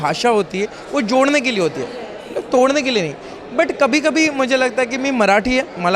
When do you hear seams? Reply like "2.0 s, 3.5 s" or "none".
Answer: none